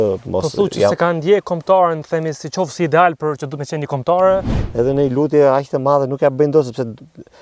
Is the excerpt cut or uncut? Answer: cut